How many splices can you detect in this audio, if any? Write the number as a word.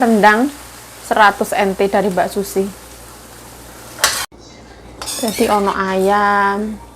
one